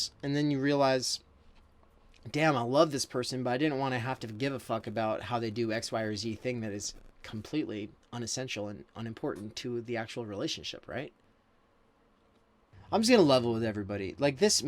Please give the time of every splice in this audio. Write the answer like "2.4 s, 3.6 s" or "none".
12.7 s